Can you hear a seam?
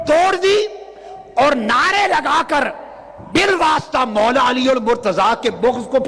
no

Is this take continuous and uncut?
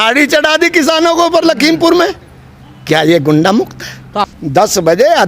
no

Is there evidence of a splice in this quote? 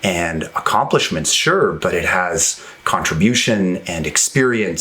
yes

